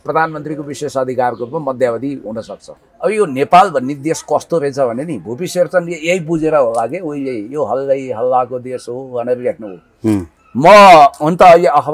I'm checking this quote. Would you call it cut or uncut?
cut